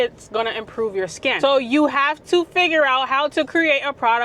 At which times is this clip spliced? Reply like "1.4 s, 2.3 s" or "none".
1.3 s